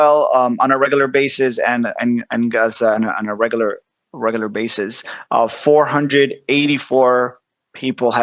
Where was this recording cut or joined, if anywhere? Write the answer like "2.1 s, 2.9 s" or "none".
none